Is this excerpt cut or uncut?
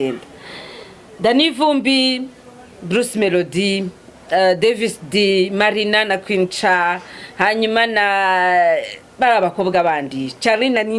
uncut